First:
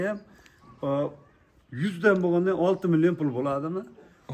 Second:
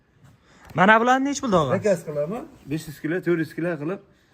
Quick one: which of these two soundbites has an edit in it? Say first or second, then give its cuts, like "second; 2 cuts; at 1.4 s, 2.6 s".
second; 1 cut; at 1.7 s